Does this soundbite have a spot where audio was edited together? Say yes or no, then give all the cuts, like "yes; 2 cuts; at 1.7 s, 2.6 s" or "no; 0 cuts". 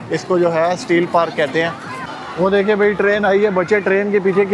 yes; 1 cut; at 1.9 s